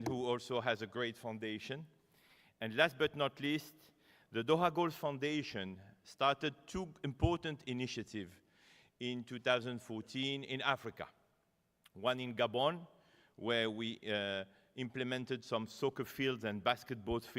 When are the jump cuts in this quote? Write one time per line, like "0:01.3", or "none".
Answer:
0:03.7

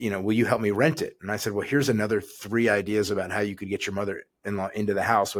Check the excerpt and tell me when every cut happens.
none

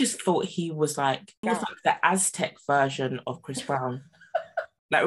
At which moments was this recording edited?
0:01.4

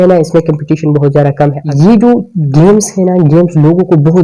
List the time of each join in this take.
0:01.6

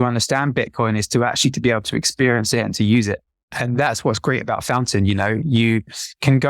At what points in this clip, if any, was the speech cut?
0:03.6

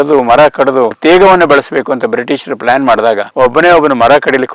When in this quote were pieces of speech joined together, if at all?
0:01.0
0:03.3

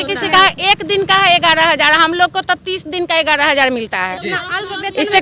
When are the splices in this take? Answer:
none

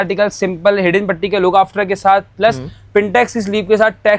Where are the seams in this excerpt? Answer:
none

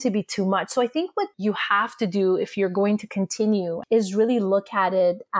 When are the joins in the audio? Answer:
0:01.3
0:03.8

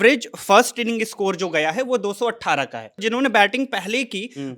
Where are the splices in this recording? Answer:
0:03.0

